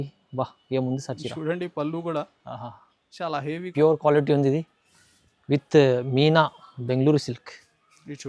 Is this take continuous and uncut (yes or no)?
no